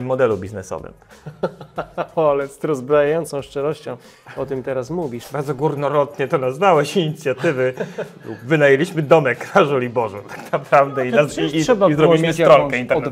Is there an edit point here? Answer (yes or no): yes